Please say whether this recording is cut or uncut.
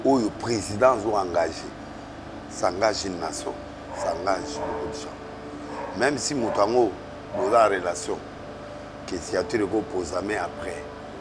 uncut